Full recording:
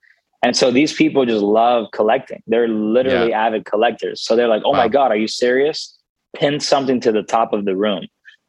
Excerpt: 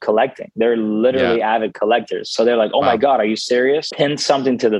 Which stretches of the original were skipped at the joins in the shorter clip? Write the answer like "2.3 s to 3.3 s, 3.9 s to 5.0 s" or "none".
5.8 s to 6.3 s